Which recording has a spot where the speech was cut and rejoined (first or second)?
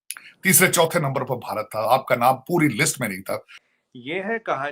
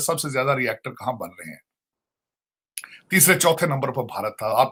first